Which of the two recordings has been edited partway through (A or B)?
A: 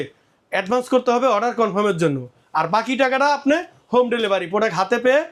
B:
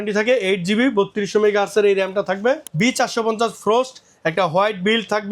B